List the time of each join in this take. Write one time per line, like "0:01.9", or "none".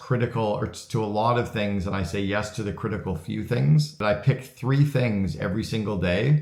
0:04.0

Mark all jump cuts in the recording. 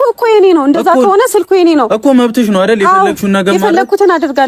none

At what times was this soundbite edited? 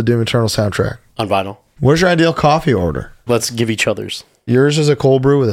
0:01.6
0:03.2
0:04.5

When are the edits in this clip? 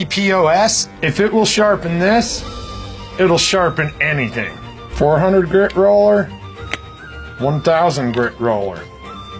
0:05.4

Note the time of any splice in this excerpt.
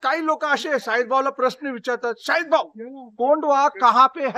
none

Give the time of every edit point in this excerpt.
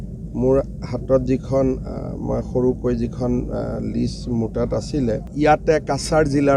0:05.3

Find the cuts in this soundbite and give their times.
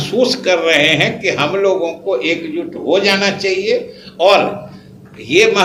none

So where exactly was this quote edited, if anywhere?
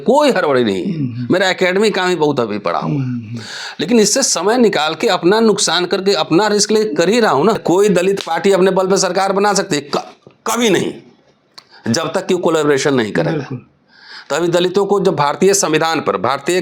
0:07.6

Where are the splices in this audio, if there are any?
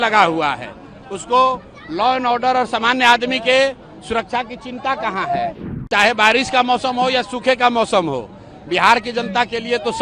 0:05.7

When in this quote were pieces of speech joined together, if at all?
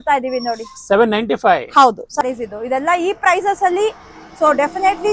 0:02.2

